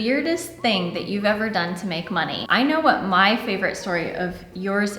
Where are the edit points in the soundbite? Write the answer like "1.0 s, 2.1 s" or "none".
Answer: 2.4 s